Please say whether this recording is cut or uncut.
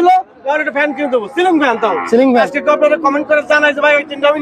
cut